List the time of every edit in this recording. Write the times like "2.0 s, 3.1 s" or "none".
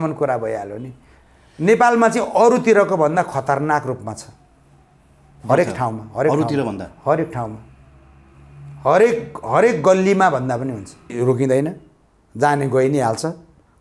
11.1 s